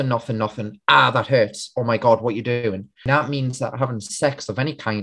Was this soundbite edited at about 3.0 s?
yes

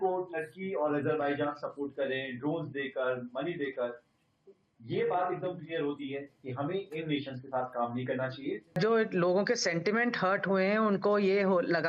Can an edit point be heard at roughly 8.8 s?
yes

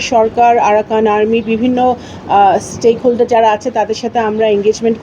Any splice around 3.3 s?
no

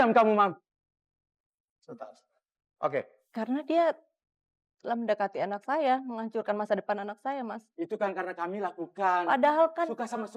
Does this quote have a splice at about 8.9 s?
no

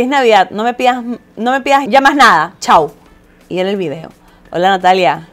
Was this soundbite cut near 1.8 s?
yes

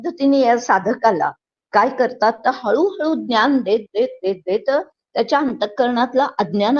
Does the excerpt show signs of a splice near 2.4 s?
no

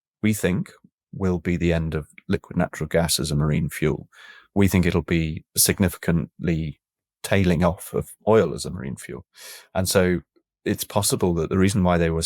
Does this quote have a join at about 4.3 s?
yes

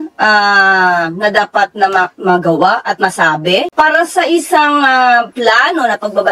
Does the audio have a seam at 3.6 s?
no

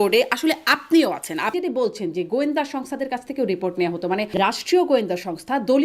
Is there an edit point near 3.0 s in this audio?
no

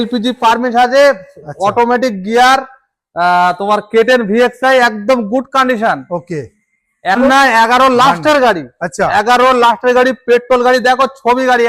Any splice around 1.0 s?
no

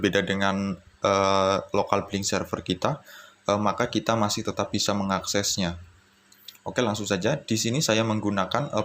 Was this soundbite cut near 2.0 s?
yes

